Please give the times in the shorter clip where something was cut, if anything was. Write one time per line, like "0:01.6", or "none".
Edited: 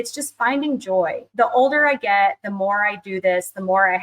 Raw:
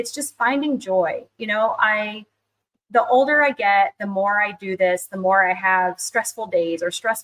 0:01.2